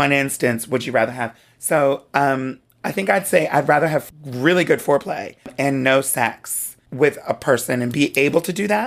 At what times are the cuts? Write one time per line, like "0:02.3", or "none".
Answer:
0:04.1
0:05.5
0:06.8